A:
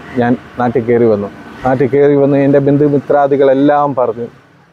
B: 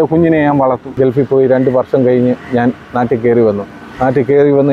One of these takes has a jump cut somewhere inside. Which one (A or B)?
B